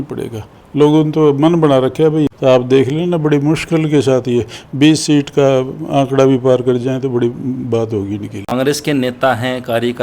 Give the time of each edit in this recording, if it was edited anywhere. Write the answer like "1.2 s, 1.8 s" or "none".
2.3 s, 8.4 s